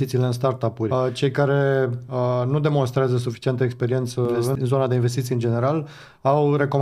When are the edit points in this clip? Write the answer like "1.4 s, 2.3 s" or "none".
0.9 s, 4.6 s